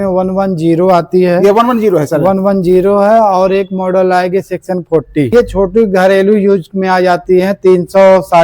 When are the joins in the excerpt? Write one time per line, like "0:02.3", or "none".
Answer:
0:05.3